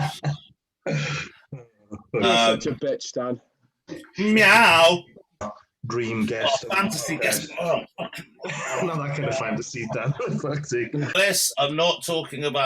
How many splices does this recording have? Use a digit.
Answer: 2